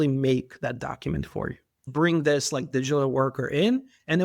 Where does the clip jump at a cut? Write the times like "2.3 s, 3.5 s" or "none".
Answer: 1.9 s